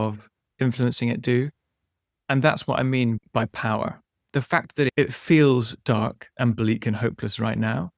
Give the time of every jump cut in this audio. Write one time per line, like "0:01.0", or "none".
0:03.2
0:04.0
0:04.9